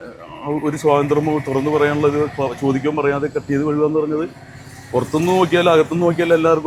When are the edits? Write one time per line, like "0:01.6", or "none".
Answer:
none